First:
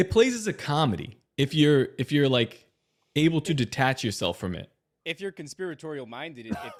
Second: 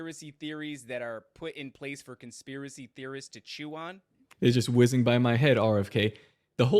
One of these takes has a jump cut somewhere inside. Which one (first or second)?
second